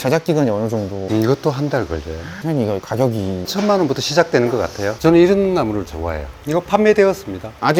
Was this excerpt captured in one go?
no; 2 cuts; at 2.3 s, 4.8 s

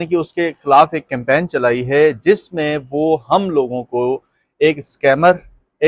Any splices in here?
no; 0 cuts

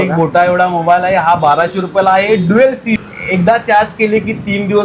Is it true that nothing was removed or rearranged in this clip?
no; 1 cut; at 3.1 s

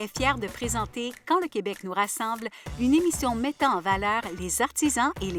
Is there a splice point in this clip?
no; 0 cuts

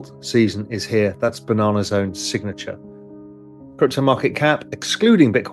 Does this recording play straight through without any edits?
yes; 0 cuts

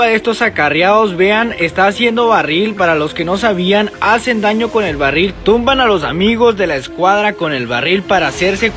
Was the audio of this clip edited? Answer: no; 0 cuts

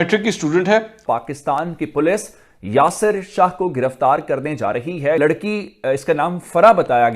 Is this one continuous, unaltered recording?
no; 2 cuts; at 1.0 s, 5.2 s

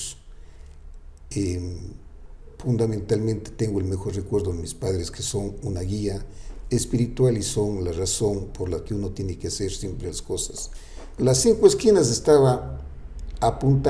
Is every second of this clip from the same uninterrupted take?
no; 1 cut; at 11.1 s

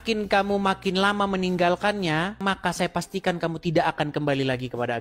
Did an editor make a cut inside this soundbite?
yes; 1 cut; at 2.4 s

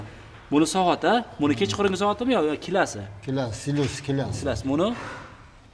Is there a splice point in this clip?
no; 0 cuts

